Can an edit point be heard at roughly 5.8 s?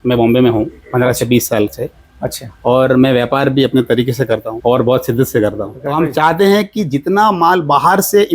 yes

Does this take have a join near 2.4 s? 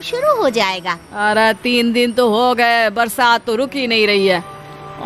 no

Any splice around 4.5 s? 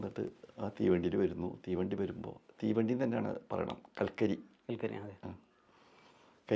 no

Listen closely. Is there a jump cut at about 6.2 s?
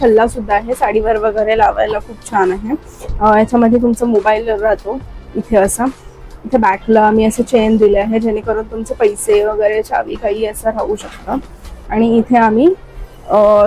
no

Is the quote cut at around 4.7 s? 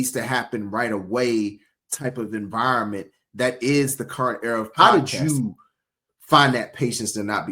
yes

